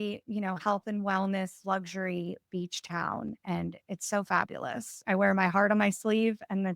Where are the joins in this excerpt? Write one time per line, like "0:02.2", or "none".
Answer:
0:04.9